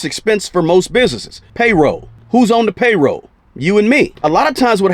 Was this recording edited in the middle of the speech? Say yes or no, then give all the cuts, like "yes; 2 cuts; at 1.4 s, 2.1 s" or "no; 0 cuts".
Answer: yes; 2 cuts; at 1.7 s, 4.1 s